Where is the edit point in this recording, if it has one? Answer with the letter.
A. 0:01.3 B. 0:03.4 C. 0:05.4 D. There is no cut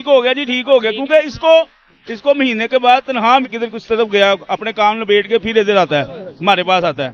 B